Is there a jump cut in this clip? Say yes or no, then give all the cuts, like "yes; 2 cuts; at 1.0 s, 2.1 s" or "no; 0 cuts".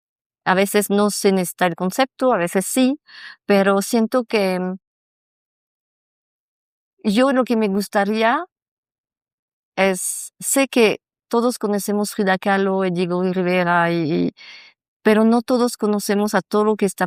no; 0 cuts